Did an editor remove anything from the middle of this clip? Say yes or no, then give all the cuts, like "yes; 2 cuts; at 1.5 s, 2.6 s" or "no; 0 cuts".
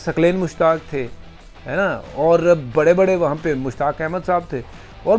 no; 0 cuts